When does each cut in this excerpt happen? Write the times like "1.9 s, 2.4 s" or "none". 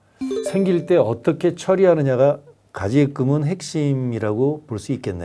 none